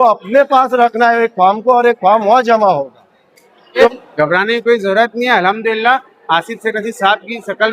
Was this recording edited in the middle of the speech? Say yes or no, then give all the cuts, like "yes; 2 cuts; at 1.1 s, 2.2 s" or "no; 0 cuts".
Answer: yes; 1 cut; at 3.9 s